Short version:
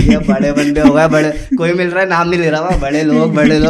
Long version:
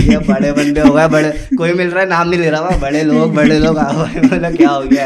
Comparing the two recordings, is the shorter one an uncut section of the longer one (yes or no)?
yes